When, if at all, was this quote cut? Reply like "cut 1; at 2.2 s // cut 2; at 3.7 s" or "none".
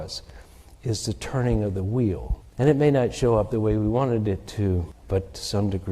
cut 1; at 2.4 s // cut 2; at 4.9 s